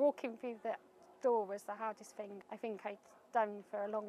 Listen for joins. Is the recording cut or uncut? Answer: cut